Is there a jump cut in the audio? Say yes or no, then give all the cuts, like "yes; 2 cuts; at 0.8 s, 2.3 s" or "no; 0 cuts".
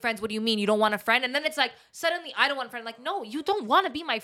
no; 0 cuts